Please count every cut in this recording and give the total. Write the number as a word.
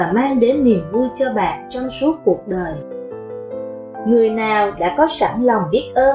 two